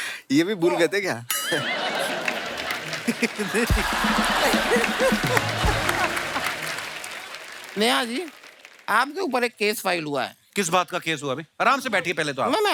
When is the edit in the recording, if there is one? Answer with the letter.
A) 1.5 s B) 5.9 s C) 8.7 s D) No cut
D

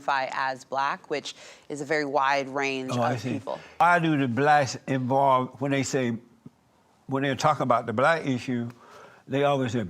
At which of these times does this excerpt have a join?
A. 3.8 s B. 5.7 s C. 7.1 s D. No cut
A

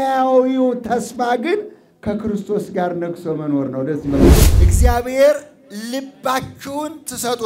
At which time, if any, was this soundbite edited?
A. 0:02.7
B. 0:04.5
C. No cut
B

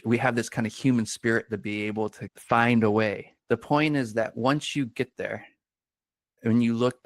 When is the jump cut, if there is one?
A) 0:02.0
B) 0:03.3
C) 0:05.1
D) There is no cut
B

